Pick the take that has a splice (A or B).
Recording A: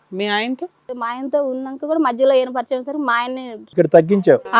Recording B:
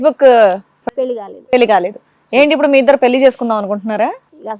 A